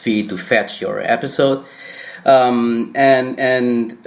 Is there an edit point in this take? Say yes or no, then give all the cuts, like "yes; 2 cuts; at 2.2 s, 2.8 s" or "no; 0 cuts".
no; 0 cuts